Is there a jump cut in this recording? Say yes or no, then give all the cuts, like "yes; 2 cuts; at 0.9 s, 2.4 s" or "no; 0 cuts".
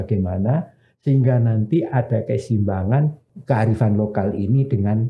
yes; 1 cut; at 3.3 s